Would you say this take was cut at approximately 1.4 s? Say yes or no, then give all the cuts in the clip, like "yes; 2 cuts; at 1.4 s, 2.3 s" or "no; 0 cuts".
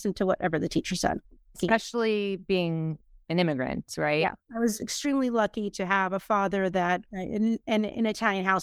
no; 0 cuts